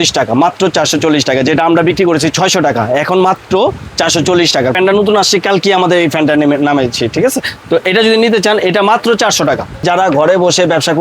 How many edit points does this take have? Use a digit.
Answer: 2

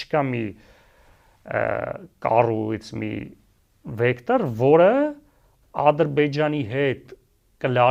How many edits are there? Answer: 0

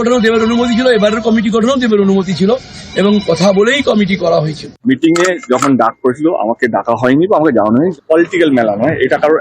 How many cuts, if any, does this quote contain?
2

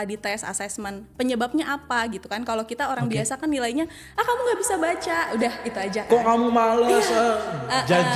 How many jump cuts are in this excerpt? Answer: 0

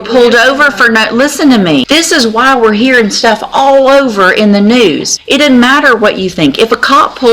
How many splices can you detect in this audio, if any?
2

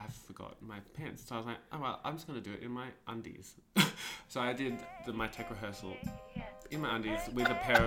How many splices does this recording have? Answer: 0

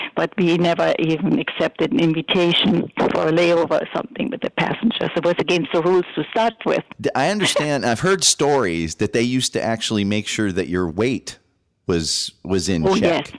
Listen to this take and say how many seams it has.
1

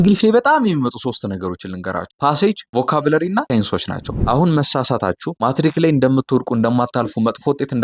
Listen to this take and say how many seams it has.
1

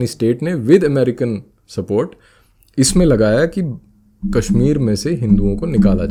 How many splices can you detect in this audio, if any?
0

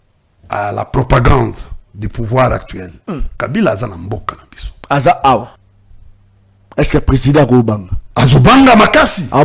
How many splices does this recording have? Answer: 1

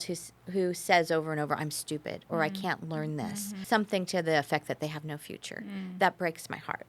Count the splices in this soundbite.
1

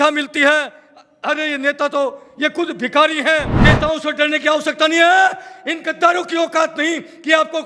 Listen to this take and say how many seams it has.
1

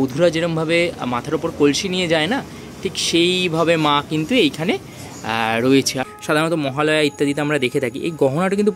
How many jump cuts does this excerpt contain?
1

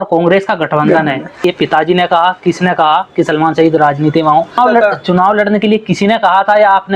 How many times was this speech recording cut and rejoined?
2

